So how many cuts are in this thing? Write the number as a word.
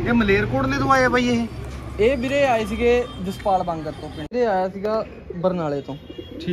one